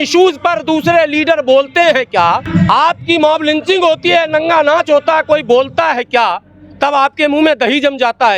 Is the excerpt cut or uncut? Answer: cut